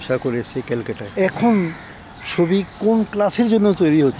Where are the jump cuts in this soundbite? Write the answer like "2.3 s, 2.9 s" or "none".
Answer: 1.0 s